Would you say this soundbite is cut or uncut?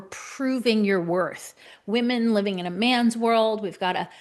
cut